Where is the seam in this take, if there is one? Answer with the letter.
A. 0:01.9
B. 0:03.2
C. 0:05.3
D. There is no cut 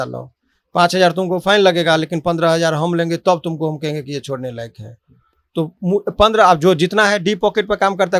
D